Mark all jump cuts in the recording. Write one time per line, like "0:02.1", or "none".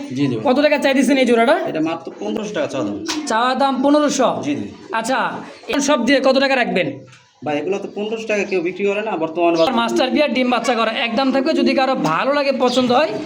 0:02.4
0:05.8
0:09.7